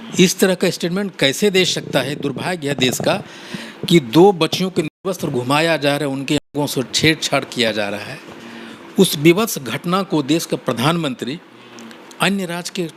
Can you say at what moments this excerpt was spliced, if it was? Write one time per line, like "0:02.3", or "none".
none